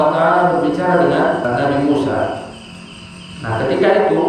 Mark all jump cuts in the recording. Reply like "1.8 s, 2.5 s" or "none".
1.4 s